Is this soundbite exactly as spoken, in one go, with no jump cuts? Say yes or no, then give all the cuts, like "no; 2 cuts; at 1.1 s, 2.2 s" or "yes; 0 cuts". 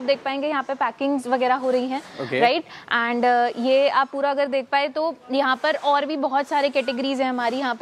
yes; 0 cuts